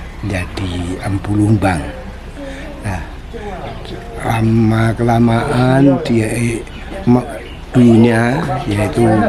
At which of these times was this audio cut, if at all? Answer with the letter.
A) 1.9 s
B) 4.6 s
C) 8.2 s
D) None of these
D